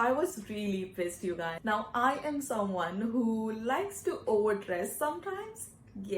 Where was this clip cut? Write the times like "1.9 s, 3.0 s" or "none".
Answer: 1.5 s